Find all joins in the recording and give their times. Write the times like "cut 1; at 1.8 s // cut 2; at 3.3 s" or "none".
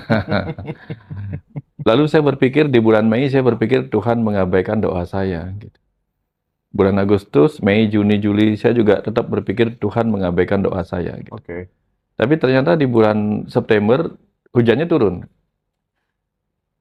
none